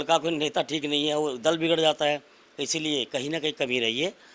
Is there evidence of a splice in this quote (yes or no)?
no